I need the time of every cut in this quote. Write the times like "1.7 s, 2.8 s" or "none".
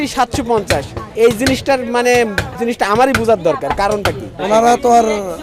1.0 s, 2.5 s, 4.3 s